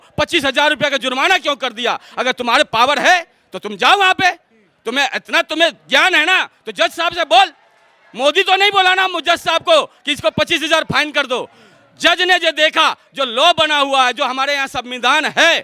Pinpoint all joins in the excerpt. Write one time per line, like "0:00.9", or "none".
none